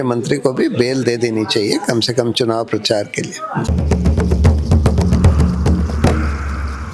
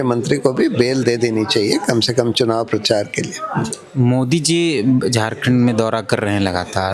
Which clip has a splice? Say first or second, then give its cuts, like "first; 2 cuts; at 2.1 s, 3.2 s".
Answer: second; 1 cut; at 3.7 s